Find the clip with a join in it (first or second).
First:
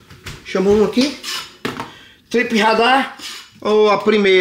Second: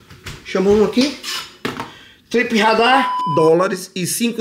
second